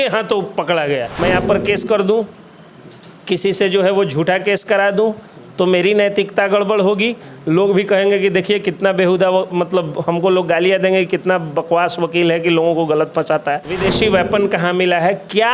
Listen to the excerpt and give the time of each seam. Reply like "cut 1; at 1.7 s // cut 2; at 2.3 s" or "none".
cut 1; at 1.1 s // cut 2; at 13.7 s